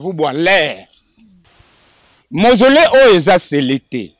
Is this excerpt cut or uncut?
cut